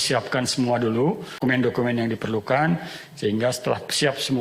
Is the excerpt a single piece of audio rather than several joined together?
no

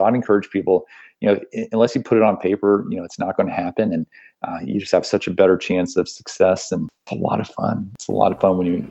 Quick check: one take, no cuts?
no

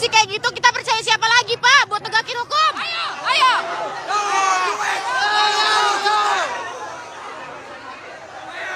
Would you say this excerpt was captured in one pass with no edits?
no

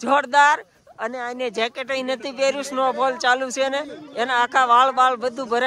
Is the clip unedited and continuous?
yes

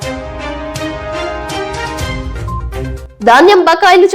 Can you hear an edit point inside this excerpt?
yes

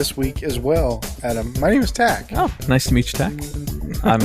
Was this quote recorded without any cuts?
no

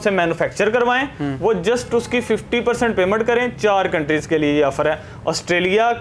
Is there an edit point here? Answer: no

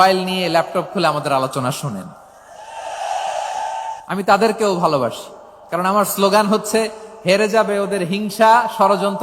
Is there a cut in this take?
yes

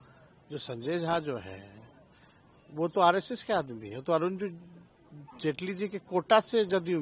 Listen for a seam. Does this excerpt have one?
no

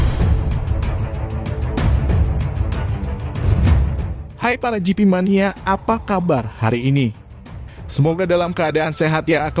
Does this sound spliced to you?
no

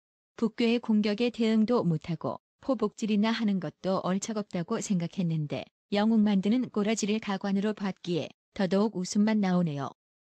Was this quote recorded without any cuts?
yes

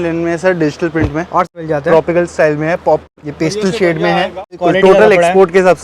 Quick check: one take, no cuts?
no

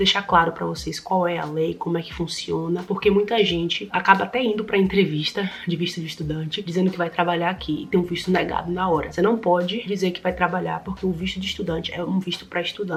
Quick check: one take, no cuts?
yes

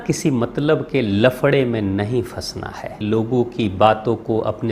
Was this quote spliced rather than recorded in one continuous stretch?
yes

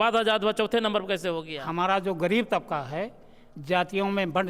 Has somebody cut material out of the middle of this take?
yes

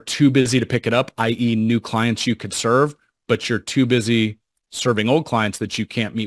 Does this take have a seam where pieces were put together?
no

